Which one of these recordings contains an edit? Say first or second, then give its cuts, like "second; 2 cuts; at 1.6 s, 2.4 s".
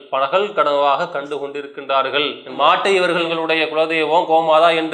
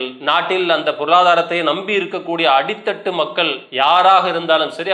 first; 2 cuts; at 2.5 s, 3.2 s